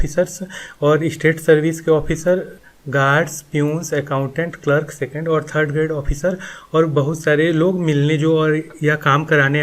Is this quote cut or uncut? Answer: cut